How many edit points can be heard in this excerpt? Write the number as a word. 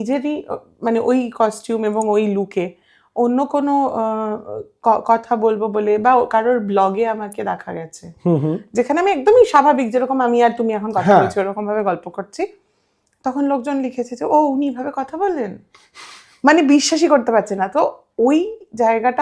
zero